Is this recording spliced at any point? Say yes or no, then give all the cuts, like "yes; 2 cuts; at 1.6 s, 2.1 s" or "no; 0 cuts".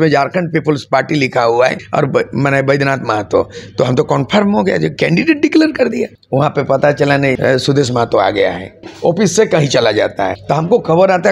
yes; 5 cuts; at 1.8 s, 6.2 s, 7.4 s, 8.9 s, 10.4 s